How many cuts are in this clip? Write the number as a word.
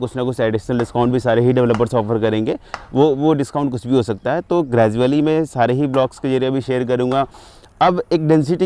one